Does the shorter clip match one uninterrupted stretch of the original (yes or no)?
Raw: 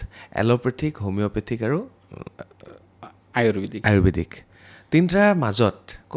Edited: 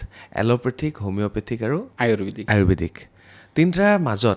no